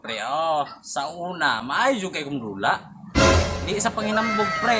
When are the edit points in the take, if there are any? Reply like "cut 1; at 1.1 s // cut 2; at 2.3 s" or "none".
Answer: cut 1; at 2.9 s // cut 2; at 3.7 s